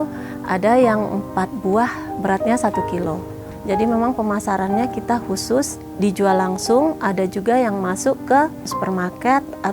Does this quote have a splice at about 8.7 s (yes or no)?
yes